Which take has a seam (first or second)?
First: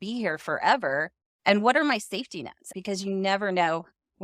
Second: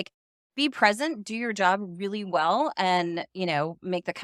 first